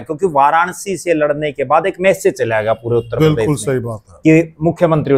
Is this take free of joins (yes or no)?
yes